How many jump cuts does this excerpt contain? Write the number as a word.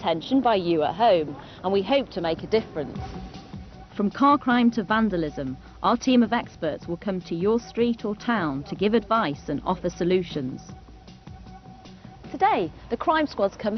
one